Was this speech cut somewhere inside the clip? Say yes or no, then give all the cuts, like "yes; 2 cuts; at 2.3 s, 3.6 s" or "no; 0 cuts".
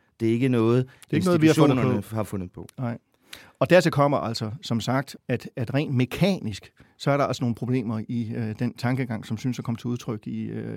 yes; 1 cut; at 5.1 s